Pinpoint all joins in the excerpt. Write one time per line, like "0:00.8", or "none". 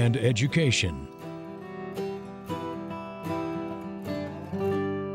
0:01.0